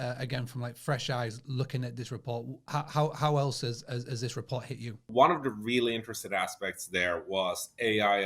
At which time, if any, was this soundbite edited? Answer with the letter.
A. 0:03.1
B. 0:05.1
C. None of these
B